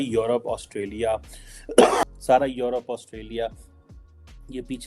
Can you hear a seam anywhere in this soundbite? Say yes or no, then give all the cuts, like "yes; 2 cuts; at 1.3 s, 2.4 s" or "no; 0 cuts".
yes; 1 cut; at 2.0 s